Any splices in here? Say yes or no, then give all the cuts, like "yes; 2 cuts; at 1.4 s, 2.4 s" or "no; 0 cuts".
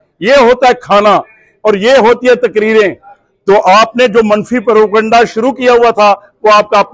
no; 0 cuts